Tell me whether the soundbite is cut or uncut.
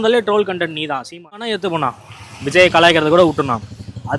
cut